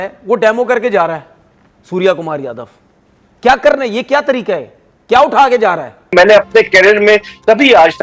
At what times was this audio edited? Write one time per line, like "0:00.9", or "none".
0:06.1